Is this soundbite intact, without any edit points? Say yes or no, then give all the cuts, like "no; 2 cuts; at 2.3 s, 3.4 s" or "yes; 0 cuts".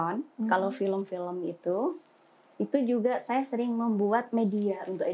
yes; 0 cuts